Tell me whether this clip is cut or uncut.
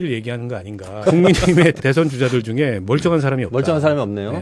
cut